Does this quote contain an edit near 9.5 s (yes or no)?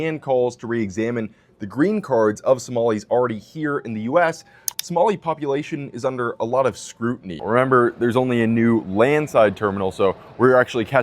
no